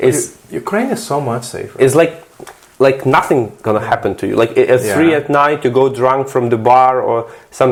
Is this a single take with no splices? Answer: yes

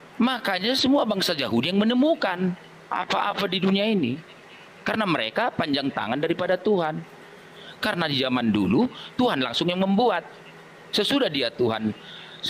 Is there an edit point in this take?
no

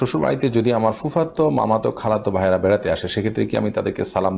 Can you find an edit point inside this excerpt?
no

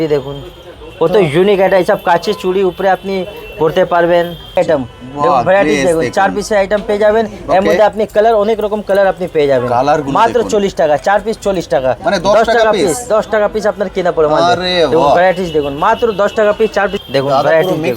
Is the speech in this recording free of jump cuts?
no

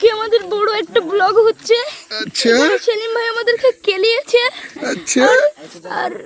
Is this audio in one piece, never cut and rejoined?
yes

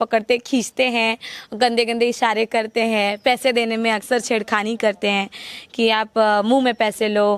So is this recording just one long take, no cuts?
yes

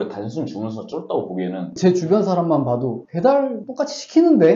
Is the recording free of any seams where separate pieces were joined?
no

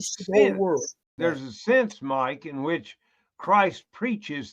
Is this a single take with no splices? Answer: no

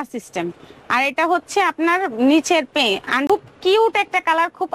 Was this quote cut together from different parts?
yes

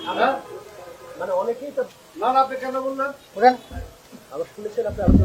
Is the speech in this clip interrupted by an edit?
yes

